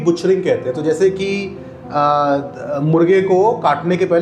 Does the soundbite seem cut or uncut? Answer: uncut